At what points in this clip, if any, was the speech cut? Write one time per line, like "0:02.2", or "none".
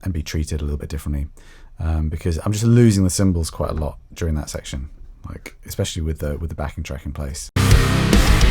none